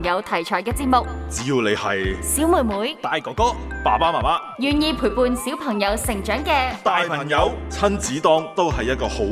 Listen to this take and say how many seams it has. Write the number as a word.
two